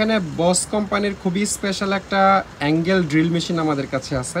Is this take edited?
no; 0 cuts

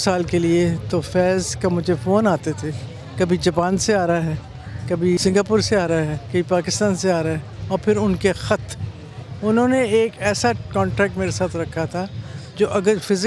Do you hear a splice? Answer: yes; 3 cuts; at 5.2 s, 6.2 s, 7.5 s

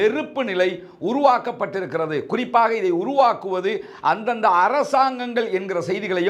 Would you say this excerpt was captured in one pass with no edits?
yes; 0 cuts

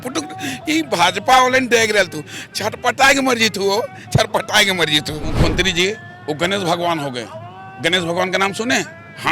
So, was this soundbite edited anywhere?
yes; 1 cut; at 5.3 s

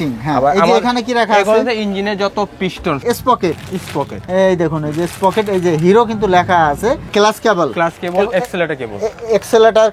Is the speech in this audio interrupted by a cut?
yes; 2 cuts; at 3.0 s, 7.1 s

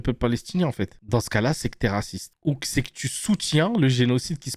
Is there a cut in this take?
no; 0 cuts

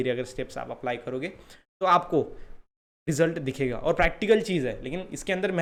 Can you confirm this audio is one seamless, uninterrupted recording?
yes; 0 cuts

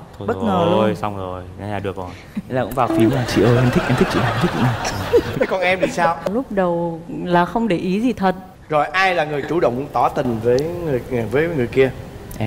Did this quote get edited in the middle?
no; 0 cuts

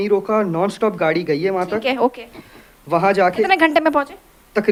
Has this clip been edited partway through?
no; 0 cuts

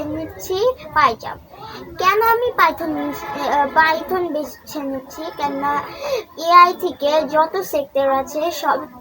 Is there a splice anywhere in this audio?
no; 0 cuts

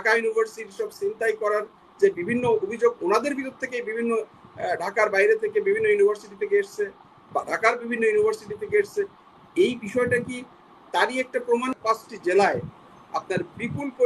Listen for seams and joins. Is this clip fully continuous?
no; 1 cut; at 11.7 s

